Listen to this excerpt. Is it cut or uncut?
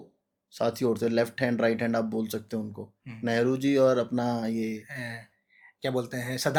uncut